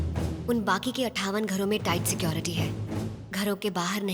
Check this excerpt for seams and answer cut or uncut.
uncut